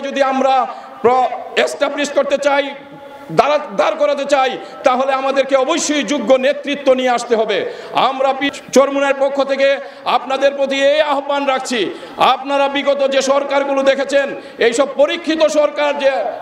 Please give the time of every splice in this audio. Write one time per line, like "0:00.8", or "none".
0:08.5